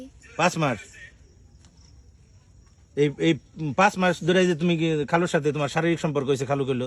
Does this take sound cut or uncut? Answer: uncut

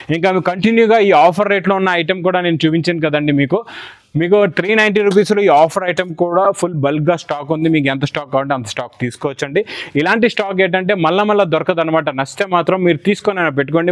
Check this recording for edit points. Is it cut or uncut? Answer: uncut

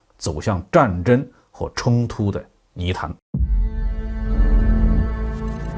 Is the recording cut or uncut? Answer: cut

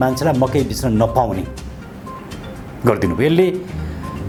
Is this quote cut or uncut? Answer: uncut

